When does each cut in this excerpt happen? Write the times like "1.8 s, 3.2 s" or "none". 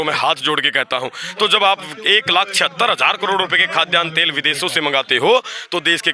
none